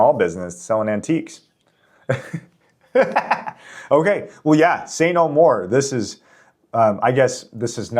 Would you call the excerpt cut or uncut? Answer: uncut